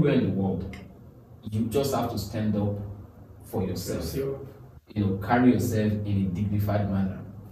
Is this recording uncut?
yes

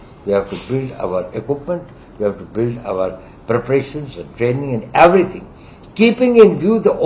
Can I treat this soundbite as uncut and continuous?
yes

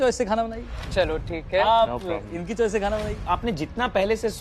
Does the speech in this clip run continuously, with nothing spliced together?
no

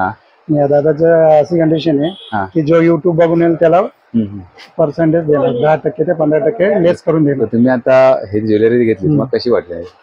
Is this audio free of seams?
yes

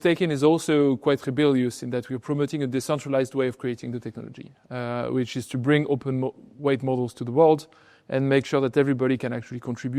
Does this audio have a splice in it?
no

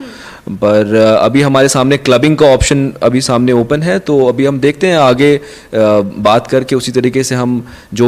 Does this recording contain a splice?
no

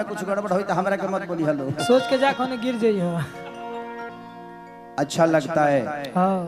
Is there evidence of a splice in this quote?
yes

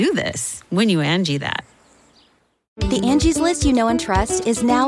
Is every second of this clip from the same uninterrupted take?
no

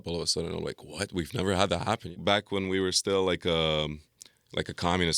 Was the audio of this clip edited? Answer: yes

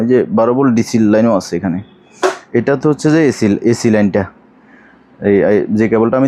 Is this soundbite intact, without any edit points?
yes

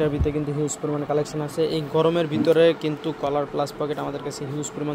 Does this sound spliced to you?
no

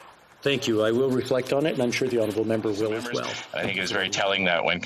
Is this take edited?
yes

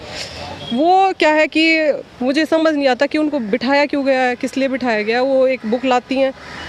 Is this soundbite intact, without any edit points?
yes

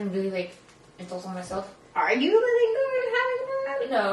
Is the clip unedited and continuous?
no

